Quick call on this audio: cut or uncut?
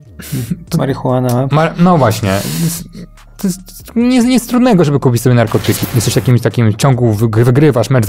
cut